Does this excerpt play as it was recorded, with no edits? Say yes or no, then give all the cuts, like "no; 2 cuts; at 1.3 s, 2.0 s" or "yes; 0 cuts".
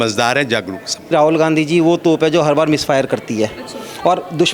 no; 1 cut; at 1.1 s